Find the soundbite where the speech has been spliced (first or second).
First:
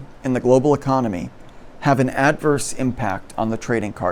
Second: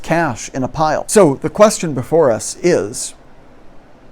second